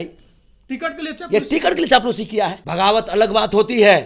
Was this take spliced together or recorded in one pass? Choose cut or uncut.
cut